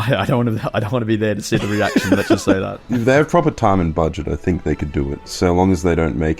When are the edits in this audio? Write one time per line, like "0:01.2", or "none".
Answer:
0:02.8
0:05.3